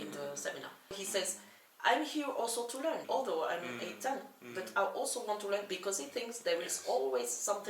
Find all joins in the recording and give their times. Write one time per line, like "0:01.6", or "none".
0:01.0
0:03.0